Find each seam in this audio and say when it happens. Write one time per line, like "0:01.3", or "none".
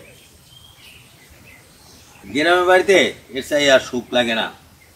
0:02.2